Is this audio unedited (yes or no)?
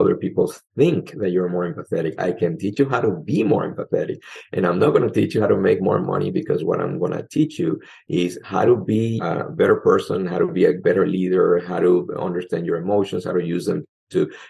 no